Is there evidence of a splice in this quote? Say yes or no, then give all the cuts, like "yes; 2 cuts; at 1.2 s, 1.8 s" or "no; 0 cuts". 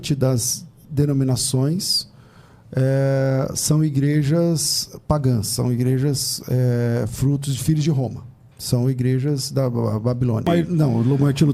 yes; 1 cut; at 10.4 s